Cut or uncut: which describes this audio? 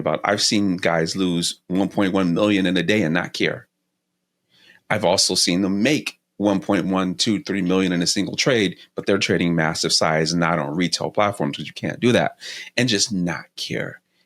uncut